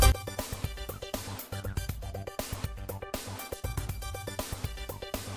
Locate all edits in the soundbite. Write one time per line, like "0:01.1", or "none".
none